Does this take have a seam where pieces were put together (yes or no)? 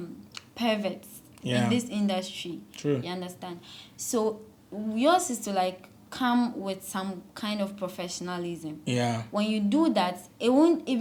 no